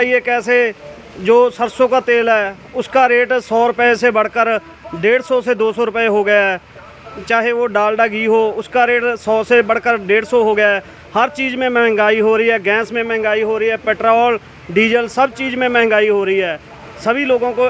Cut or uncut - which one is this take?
uncut